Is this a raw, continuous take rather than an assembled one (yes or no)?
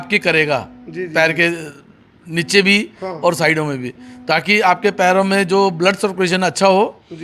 yes